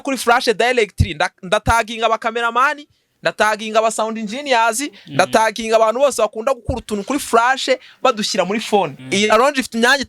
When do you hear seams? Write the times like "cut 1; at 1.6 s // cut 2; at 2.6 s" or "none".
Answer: cut 1; at 9.0 s